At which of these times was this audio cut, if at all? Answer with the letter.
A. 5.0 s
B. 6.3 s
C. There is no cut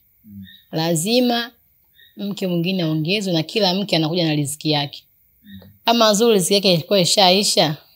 C